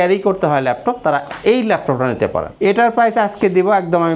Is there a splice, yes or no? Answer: yes